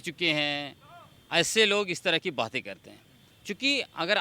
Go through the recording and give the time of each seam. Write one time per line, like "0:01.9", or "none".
none